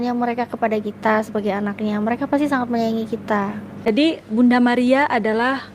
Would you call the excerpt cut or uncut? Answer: cut